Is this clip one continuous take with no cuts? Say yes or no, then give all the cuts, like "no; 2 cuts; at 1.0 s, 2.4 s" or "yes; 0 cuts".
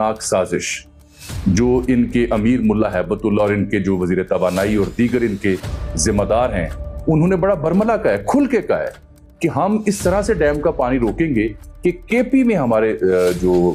yes; 0 cuts